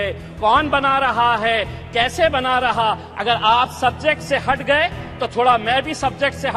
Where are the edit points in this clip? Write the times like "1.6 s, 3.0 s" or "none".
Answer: none